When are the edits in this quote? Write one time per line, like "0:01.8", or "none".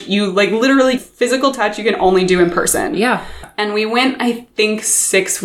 0:03.5